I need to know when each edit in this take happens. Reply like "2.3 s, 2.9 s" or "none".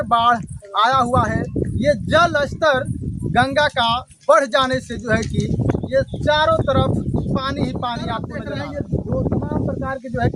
8.4 s